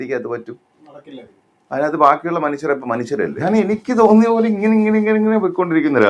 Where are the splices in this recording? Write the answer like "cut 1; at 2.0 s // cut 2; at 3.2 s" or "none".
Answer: cut 1; at 3.4 s